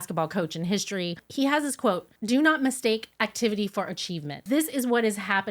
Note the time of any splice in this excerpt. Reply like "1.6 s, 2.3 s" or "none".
1.3 s, 2.1 s, 4.4 s